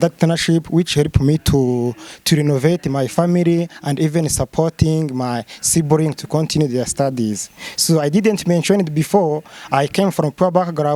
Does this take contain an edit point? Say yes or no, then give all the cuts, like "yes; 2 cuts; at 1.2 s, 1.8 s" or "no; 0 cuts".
no; 0 cuts